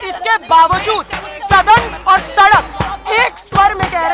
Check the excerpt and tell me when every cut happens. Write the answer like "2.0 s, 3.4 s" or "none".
none